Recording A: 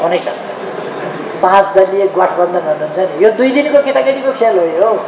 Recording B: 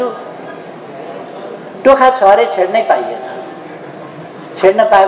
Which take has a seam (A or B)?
A